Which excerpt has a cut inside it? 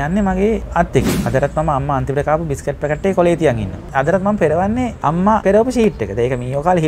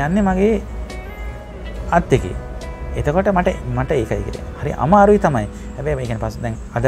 first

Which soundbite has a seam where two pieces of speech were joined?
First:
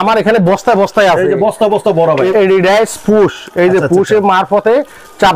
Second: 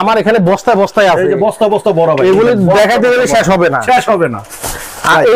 first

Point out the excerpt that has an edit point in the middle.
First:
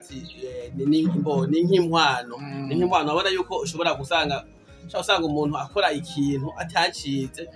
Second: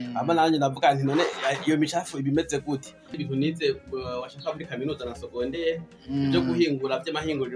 second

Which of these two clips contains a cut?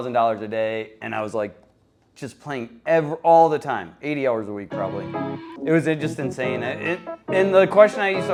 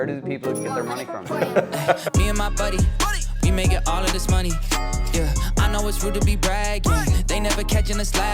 second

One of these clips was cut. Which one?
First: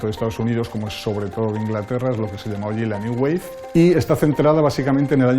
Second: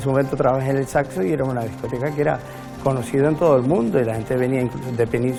first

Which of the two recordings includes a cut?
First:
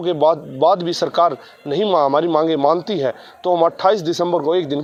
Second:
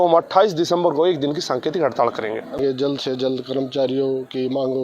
second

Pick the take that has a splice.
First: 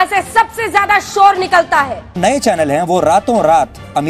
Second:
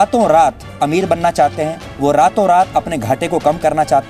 first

